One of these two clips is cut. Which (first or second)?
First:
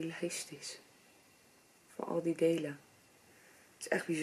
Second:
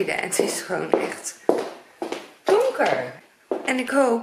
second